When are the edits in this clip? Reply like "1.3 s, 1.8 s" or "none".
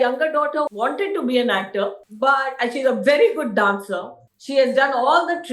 none